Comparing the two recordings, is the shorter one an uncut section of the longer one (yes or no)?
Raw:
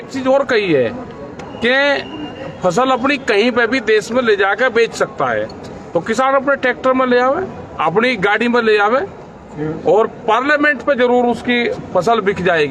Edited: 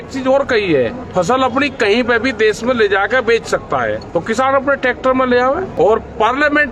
no